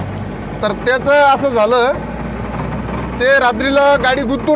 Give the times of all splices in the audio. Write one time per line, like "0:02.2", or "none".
none